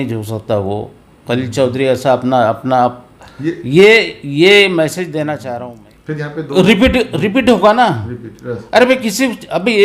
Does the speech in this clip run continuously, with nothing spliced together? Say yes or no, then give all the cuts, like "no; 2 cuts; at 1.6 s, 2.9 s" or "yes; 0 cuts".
no; 1 cut; at 5.4 s